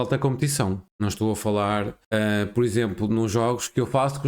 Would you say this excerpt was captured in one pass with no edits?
no; 2 cuts; at 0.9 s, 2.0 s

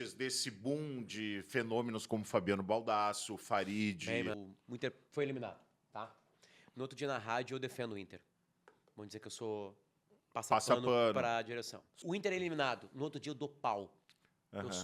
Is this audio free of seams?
no; 2 cuts; at 4.4 s, 12.0 s

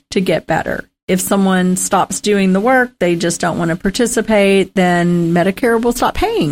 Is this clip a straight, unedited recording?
yes; 0 cuts

